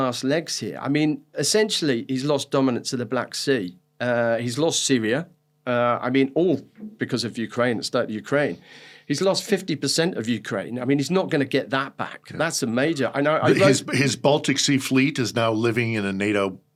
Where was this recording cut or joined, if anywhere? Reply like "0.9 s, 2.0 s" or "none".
none